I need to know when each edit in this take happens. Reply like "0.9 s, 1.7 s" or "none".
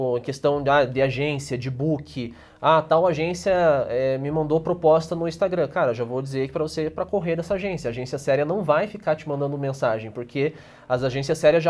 none